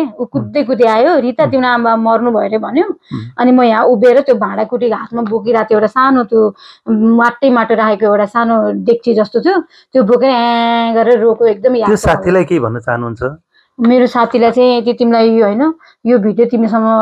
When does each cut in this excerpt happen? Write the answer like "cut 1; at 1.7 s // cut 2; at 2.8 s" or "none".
none

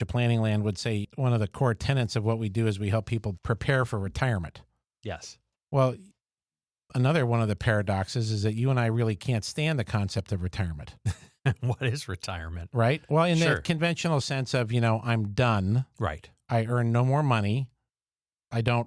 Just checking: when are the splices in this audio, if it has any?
cut 1; at 1.0 s // cut 2; at 3.4 s

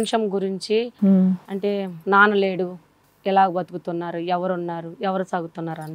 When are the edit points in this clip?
none

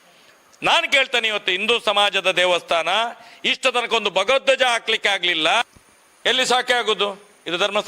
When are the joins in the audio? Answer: cut 1; at 5.6 s

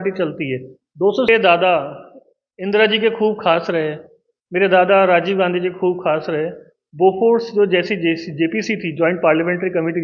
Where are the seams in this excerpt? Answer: cut 1; at 1.3 s

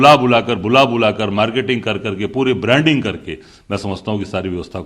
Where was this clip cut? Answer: none

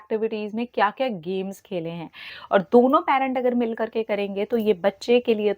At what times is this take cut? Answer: cut 1; at 2.3 s

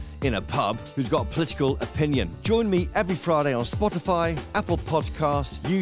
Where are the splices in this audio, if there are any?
none

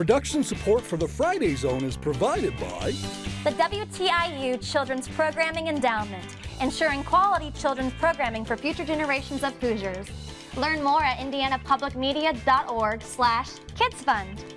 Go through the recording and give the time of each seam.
none

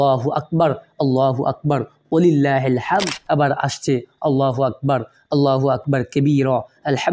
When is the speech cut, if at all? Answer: cut 1; at 3.2 s

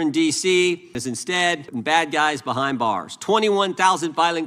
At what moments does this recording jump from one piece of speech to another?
cut 1; at 1.4 s

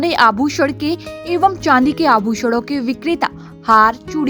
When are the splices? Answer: none

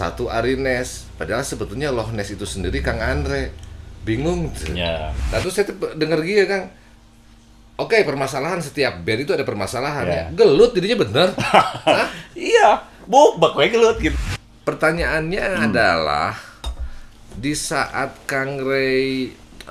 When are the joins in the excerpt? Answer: cut 1; at 5.2 s // cut 2; at 14.0 s

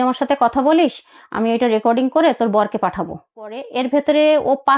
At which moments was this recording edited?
cut 1; at 3.6 s

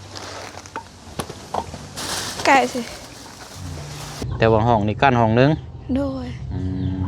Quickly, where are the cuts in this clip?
cut 1; at 4.3 s

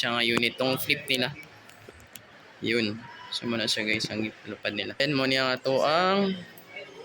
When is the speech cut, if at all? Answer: cut 1; at 5.0 s

